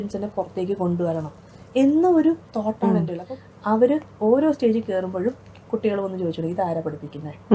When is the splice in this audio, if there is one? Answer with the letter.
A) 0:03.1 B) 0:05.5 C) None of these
A